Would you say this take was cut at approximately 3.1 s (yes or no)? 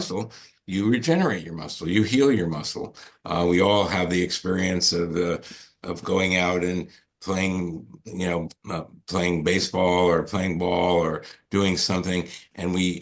no